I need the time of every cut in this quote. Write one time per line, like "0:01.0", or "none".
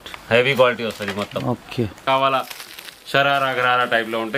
0:02.0